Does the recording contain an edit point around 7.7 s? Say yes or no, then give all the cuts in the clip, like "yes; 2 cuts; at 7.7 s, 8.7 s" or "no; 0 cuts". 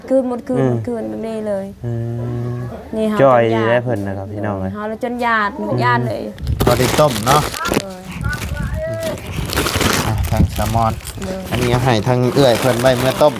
no; 1 cut; at 6.4 s